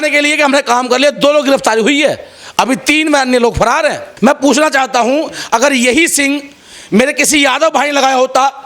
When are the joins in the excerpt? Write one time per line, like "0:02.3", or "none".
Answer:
0:04.1